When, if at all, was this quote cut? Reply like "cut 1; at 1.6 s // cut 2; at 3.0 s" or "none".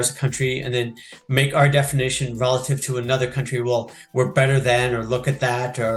none